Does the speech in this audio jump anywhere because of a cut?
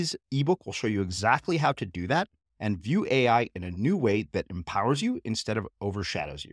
no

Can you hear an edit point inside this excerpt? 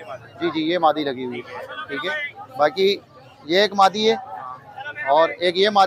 no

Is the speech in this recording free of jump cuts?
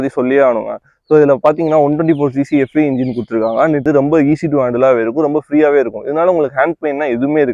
no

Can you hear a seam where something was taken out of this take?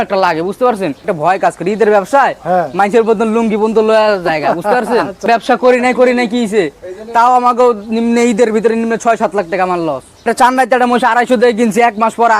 yes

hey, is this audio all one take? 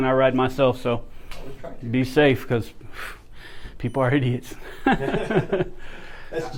yes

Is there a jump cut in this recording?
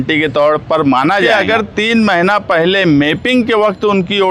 yes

